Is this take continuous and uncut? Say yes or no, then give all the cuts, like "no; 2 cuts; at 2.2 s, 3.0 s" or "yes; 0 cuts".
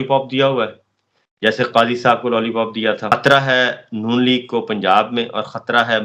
no; 1 cut; at 3.1 s